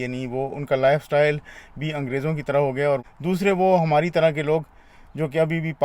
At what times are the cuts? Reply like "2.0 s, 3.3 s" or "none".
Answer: 3.0 s